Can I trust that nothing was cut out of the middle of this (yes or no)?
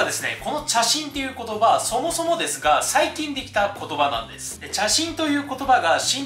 yes